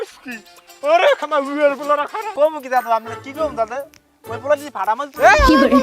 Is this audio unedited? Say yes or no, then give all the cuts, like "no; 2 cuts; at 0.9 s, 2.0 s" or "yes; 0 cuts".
no; 1 cut; at 2.3 s